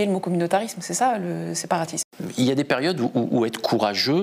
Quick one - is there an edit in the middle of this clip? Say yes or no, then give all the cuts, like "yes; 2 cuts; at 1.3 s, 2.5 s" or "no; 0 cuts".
yes; 1 cut; at 2.1 s